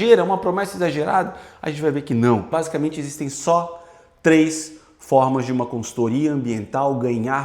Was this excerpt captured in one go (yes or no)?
no